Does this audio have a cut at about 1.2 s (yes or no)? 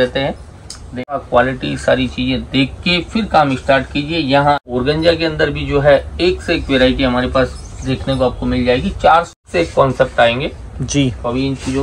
yes